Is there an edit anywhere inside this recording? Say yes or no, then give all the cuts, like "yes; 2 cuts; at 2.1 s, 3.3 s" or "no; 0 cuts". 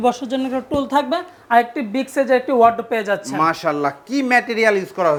no; 0 cuts